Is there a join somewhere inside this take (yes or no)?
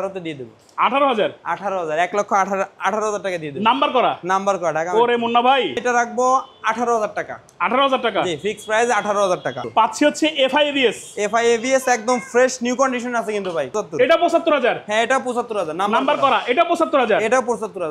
yes